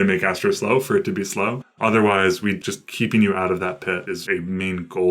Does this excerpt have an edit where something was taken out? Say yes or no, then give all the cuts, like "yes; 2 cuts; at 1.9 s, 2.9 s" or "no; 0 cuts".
yes; 3 cuts; at 1.6 s, 2.6 s, 4.2 s